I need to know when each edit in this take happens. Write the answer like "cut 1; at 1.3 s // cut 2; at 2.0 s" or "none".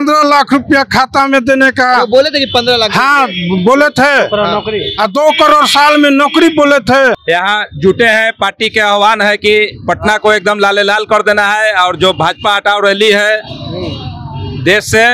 cut 1; at 7.2 s